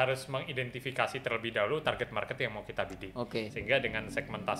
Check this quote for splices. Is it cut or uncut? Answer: cut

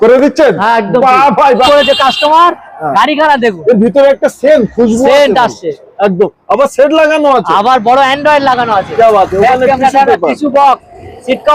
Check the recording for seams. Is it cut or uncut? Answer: cut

